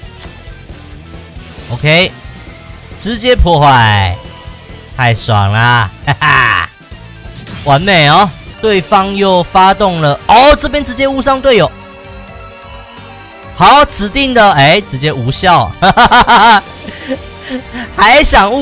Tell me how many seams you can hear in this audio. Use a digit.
1